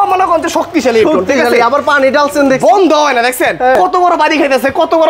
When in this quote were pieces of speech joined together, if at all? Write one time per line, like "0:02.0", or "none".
none